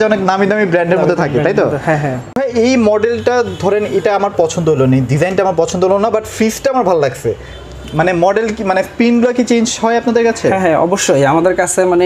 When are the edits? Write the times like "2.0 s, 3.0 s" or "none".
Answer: 2.3 s

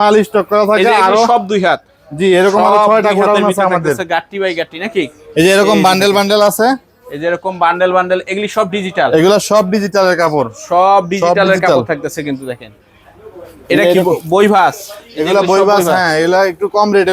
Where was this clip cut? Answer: none

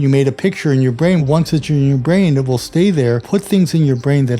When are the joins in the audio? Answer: 1.2 s, 3.2 s

